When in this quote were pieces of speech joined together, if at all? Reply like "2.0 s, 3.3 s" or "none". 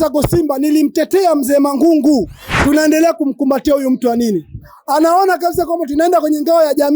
2.5 s